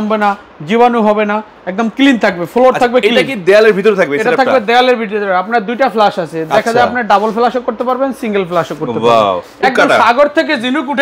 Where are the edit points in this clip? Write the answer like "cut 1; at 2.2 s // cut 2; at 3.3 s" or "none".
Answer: cut 1; at 9.6 s